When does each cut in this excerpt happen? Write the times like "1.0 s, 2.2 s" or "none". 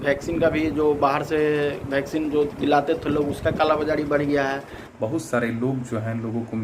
4.8 s

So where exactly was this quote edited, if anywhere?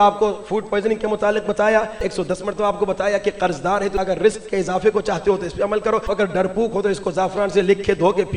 2.0 s, 3.9 s, 6.1 s

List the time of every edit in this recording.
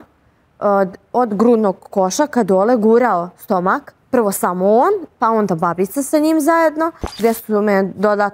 3.9 s, 7.2 s

